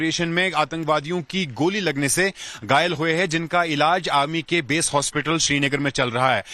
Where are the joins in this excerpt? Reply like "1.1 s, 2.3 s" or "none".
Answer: 5.4 s

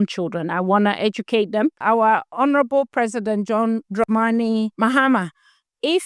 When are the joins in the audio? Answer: 2.1 s, 3.9 s, 4.7 s

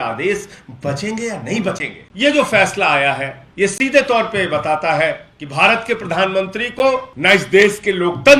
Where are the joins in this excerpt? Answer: 2.0 s, 3.4 s, 5.4 s, 7.1 s

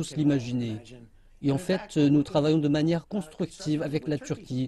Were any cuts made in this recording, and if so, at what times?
3.0 s

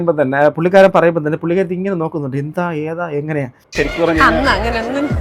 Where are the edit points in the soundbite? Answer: 3.7 s

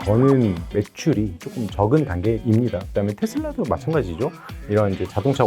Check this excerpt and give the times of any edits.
2.8 s

